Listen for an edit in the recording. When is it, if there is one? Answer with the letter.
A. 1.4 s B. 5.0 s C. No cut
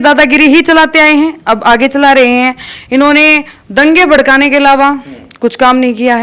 C